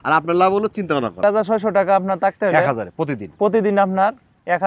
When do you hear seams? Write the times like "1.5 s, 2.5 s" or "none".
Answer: 1.2 s